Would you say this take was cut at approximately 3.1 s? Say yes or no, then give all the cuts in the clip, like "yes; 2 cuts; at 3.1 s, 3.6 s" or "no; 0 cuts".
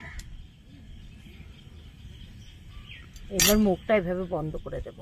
yes; 1 cut; at 3.1 s